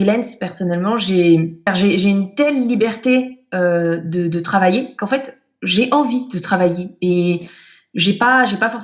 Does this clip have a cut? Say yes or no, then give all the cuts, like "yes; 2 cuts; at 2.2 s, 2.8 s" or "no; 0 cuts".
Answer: yes; 1 cut; at 1.7 s